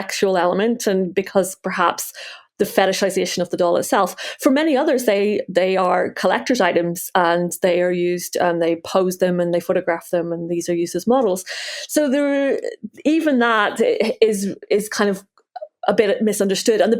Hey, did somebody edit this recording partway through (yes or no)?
no